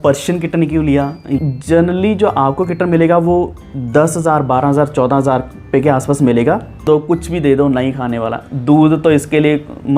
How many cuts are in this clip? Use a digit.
2